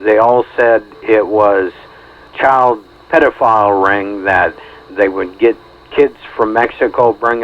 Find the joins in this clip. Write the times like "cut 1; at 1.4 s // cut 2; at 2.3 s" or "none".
cut 1; at 2.3 s // cut 2; at 2.9 s